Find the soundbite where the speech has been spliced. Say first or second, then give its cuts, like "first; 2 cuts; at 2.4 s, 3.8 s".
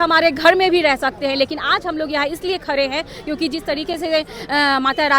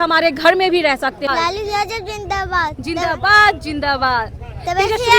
second; 1 cut; at 1.3 s